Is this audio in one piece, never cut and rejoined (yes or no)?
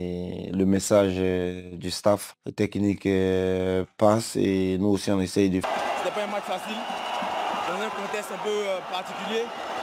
no